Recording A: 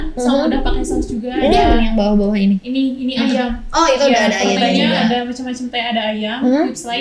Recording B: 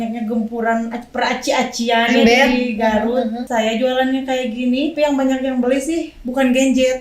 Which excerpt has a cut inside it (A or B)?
B